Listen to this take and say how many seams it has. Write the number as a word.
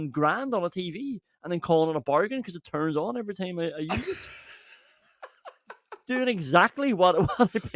zero